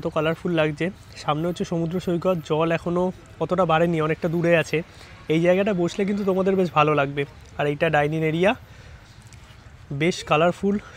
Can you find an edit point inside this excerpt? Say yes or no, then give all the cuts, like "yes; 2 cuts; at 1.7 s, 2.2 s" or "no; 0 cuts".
no; 0 cuts